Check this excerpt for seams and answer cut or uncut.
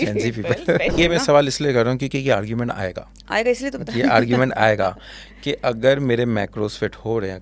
cut